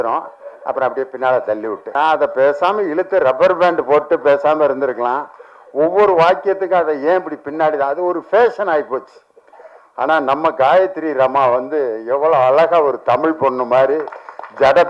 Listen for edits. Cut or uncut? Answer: uncut